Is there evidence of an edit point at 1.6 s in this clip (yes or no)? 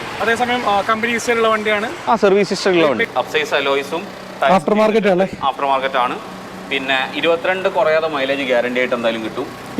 no